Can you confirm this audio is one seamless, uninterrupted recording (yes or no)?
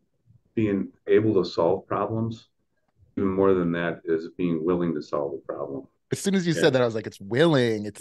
no